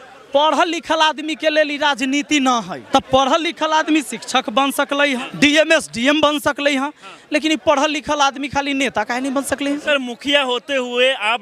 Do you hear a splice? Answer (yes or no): yes